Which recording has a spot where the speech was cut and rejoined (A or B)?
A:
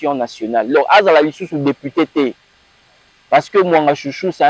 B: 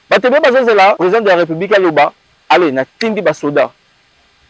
B